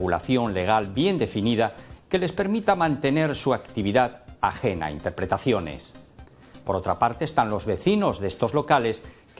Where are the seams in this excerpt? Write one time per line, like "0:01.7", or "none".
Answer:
0:02.4